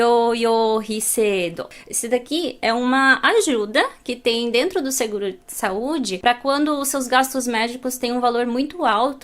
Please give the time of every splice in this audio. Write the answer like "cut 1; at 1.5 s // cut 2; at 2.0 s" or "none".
cut 1; at 1.7 s

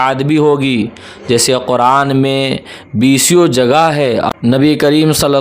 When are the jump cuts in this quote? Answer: cut 1; at 4.3 s

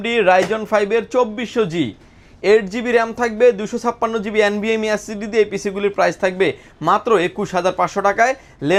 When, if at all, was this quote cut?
none

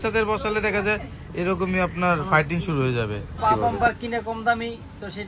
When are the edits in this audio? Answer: cut 1; at 3.4 s

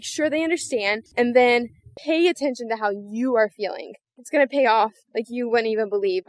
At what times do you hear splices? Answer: cut 1; at 1.0 s // cut 2; at 4.2 s // cut 3; at 5.0 s

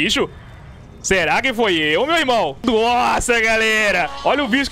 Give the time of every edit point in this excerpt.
cut 1; at 2.6 s

